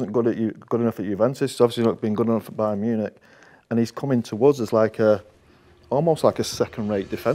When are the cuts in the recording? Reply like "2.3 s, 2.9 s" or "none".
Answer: none